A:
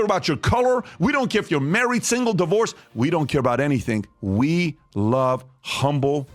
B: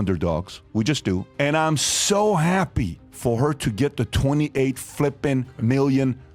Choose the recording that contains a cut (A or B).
B